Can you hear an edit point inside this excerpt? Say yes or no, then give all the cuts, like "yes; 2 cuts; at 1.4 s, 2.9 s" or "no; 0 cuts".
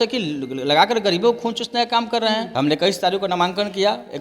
yes; 1 cut; at 2.5 s